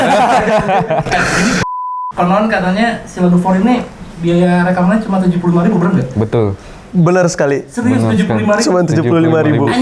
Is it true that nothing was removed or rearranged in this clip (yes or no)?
no